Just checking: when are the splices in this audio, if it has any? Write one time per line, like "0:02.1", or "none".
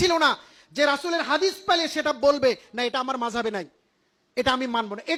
none